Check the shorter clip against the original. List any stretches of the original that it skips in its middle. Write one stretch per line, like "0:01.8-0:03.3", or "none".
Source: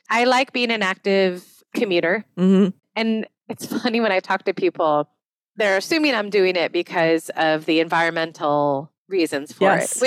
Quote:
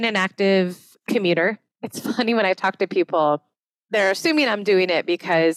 0:02.3-0:03.3